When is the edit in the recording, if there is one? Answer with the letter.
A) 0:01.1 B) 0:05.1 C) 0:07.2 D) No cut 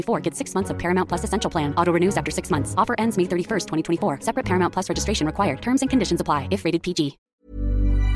C